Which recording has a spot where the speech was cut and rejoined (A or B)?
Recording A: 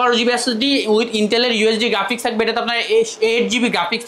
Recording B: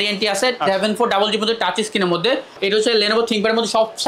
B